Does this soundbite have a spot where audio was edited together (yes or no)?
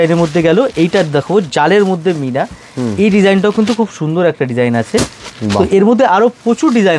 no